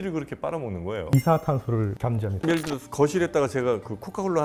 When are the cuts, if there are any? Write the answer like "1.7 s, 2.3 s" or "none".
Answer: 2.4 s